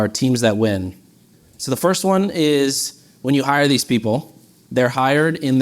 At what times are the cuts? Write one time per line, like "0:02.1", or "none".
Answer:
0:01.6